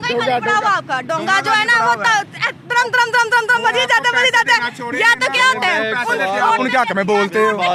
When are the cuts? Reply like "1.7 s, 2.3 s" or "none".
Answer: none